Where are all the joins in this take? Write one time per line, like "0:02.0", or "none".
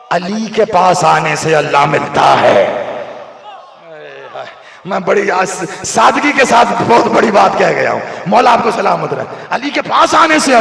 none